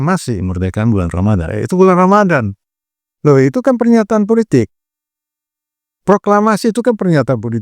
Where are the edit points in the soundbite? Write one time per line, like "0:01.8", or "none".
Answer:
0:02.6